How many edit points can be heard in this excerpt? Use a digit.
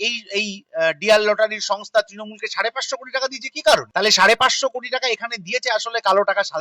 1